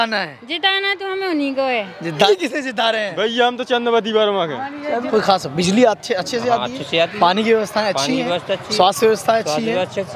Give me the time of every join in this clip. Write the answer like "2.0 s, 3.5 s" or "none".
2.3 s, 5.0 s